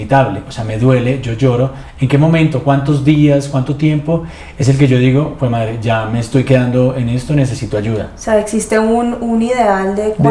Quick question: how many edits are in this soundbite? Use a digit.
0